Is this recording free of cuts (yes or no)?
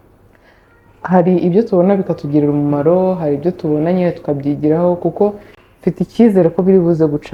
yes